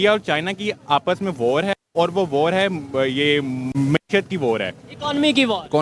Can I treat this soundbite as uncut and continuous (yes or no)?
no